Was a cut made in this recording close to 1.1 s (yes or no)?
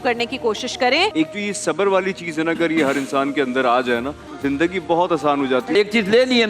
yes